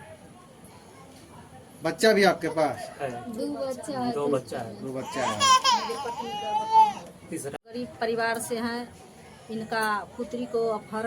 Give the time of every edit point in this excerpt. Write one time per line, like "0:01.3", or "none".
0:07.5

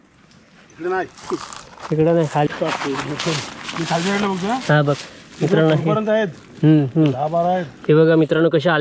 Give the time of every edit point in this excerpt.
0:02.5

